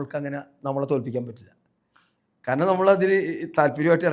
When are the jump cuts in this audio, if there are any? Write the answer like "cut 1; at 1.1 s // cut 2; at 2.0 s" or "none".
none